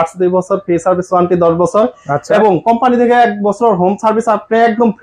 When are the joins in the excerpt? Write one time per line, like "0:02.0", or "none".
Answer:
none